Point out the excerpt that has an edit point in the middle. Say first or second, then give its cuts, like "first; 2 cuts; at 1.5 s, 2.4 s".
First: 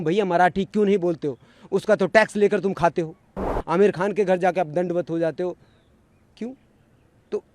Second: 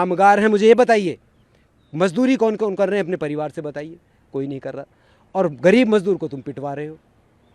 first; 1 cut; at 3.5 s